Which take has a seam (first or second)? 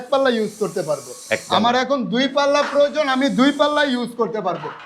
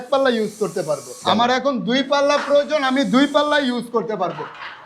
second